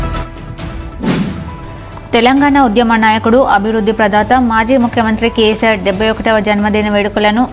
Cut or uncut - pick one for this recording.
cut